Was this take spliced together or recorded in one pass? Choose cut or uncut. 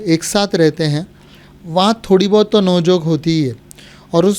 uncut